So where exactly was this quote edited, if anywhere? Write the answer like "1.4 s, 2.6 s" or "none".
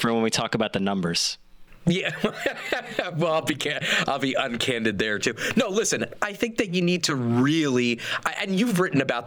none

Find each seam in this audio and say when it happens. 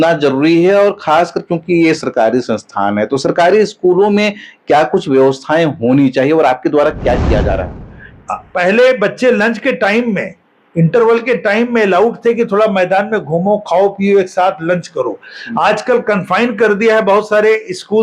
7.7 s

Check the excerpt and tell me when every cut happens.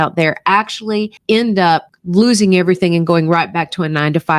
none

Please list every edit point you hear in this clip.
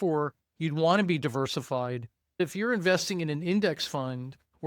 2.4 s

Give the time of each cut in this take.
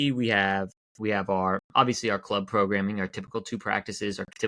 1.7 s

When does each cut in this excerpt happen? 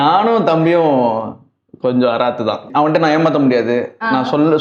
2.7 s

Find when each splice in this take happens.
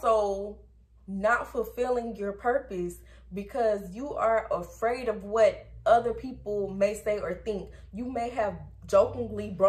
none

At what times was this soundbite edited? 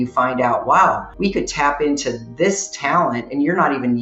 1.1 s

